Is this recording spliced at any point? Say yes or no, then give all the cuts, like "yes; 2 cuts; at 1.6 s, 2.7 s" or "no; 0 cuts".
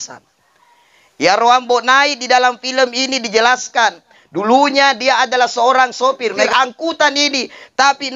yes; 1 cut; at 6.4 s